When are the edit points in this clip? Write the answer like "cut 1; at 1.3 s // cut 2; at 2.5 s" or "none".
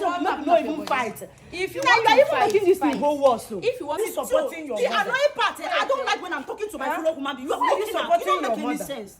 cut 1; at 4.0 s